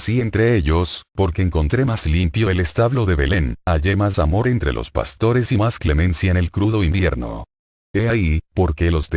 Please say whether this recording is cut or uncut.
uncut